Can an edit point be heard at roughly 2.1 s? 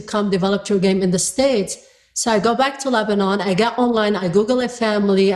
no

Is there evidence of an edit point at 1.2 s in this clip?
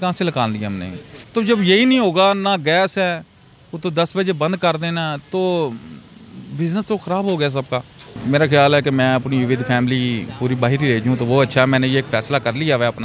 yes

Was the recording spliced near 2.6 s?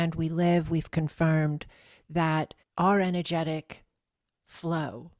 yes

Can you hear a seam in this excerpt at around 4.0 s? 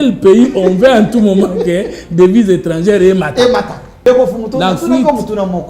yes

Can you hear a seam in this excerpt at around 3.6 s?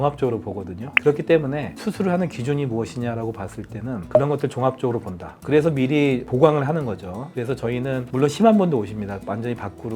no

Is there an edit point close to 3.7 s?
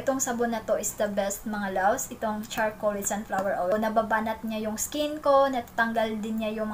yes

